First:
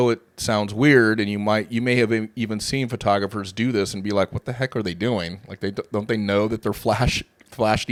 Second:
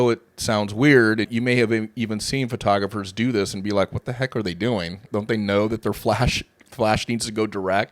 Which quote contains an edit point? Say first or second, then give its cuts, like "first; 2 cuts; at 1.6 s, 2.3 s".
second; 2 cuts; at 1.3 s, 5.0 s